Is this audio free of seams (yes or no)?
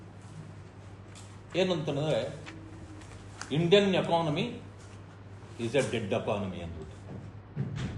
yes